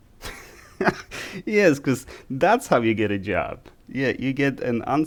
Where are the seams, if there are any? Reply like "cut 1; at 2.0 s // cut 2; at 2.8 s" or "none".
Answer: none